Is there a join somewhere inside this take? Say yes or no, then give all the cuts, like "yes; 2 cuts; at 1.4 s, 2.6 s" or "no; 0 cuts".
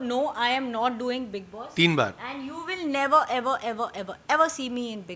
no; 0 cuts